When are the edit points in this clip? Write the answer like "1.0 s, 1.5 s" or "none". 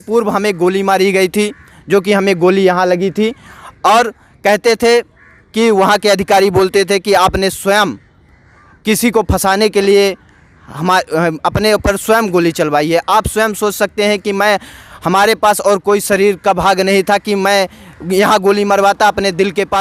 none